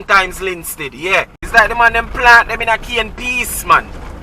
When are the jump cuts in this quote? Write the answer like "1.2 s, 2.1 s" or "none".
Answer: 1.4 s

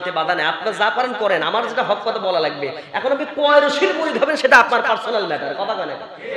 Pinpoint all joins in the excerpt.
none

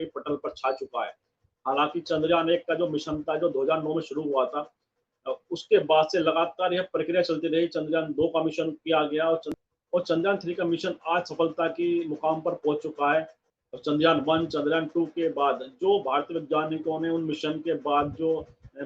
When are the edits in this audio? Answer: 9.5 s, 13.4 s

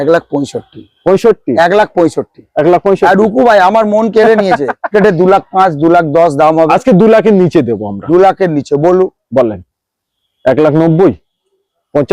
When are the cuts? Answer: 4.9 s

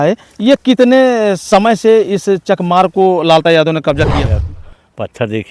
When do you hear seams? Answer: 4.3 s

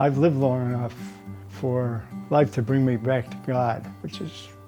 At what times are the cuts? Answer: 1.0 s, 2.1 s

